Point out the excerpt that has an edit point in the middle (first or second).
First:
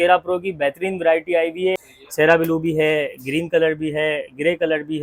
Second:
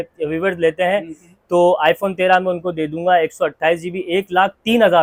first